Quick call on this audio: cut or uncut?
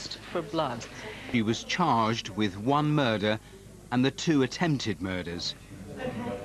cut